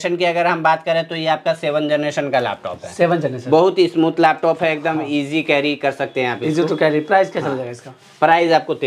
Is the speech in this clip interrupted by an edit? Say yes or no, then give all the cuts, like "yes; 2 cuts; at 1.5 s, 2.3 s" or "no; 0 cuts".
no; 0 cuts